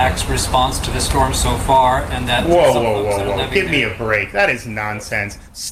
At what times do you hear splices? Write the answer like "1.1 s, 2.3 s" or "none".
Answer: none